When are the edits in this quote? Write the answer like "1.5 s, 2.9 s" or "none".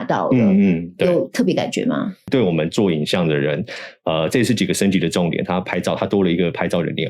2.3 s